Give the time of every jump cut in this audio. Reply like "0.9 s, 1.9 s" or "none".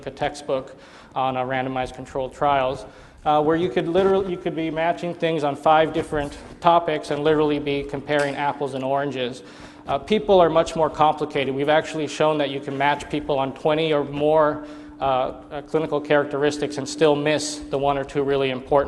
16.7 s